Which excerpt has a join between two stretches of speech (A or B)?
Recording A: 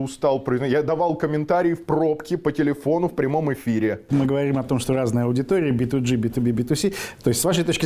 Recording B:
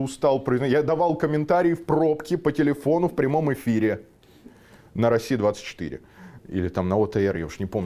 A